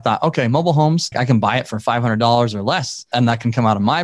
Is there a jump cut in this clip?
yes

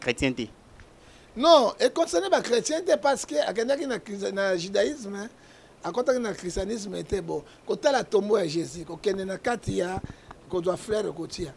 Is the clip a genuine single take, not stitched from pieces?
yes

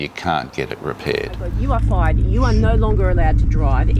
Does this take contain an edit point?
yes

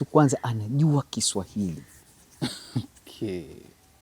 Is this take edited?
no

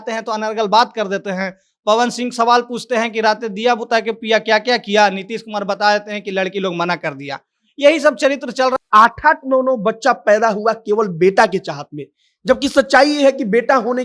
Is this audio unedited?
no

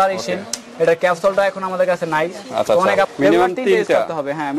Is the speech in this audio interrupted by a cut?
yes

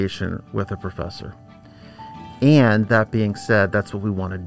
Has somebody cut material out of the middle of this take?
no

